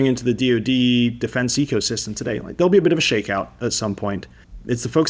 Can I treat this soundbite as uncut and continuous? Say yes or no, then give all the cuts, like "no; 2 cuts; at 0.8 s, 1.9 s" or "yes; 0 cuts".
yes; 0 cuts